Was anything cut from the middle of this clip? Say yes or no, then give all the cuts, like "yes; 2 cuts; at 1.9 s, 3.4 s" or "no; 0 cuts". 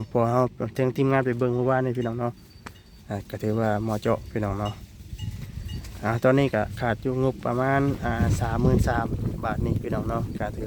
no; 0 cuts